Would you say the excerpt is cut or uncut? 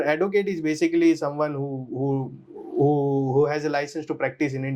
uncut